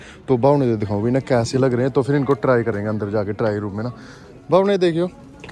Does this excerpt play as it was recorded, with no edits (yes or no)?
yes